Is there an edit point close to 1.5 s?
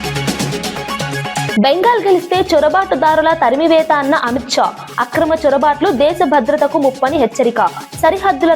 yes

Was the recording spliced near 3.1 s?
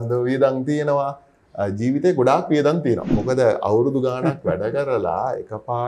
yes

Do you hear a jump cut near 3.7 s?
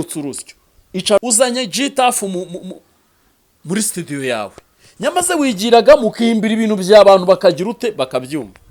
no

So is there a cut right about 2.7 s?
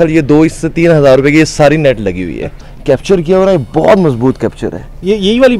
yes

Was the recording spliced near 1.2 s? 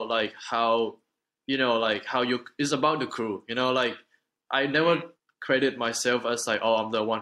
no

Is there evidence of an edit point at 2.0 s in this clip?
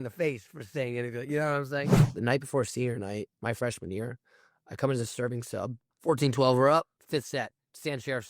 yes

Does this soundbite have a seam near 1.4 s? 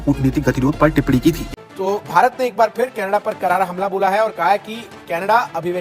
yes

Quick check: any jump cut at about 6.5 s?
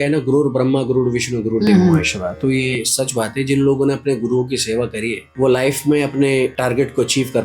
yes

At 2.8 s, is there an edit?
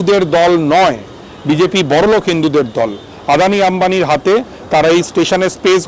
no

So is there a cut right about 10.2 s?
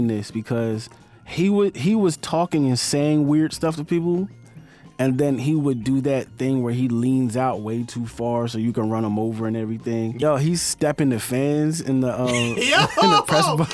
yes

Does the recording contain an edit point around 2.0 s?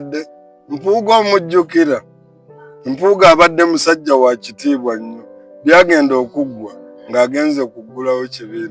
no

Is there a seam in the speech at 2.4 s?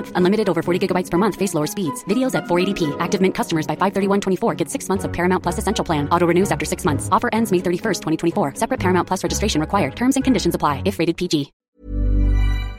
no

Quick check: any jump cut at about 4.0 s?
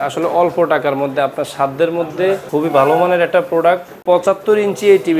yes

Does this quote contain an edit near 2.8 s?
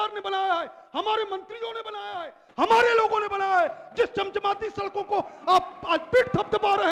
no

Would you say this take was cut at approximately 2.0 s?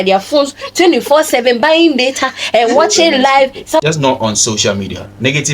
no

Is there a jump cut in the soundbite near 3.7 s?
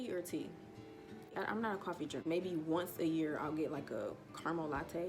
no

